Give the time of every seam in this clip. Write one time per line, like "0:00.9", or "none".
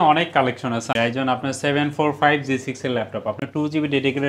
0:00.9